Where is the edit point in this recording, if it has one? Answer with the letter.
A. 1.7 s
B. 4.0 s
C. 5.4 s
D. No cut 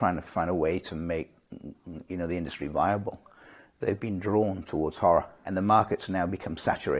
C